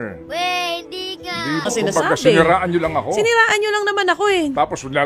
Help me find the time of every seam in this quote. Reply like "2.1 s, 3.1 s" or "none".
1.7 s